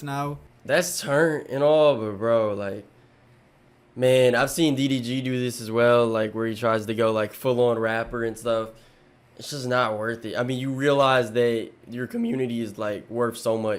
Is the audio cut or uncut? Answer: uncut